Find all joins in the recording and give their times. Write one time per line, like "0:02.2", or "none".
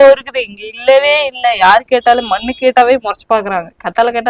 none